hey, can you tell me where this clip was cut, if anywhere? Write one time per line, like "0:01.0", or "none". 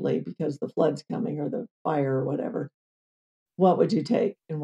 none